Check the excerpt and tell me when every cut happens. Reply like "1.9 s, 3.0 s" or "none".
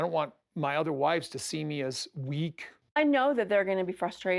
2.6 s